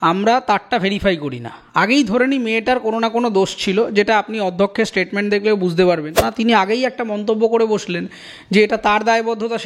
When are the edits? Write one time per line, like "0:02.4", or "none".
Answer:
0:06.3